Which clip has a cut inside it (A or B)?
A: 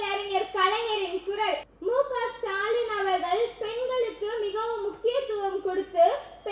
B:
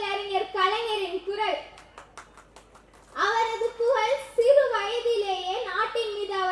A